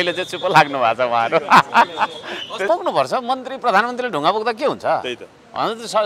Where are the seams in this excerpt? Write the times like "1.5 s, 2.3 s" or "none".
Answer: 2.6 s